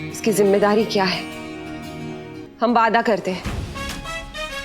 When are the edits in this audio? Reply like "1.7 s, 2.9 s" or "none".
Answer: 2.5 s, 3.4 s